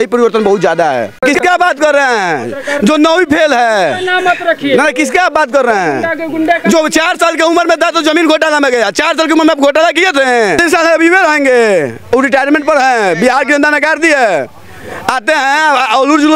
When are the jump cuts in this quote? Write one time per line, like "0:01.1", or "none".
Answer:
0:01.2
0:10.6